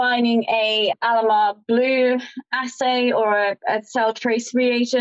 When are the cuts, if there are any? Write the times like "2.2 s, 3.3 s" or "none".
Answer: none